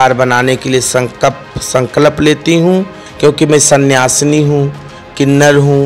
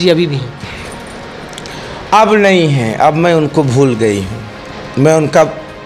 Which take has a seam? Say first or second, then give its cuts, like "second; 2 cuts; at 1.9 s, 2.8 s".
first; 1 cut; at 3.0 s